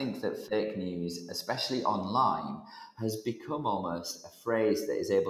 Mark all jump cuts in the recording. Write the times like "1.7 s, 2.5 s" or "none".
none